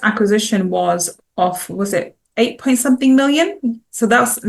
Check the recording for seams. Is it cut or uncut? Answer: uncut